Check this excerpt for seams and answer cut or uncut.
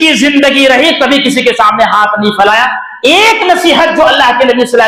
uncut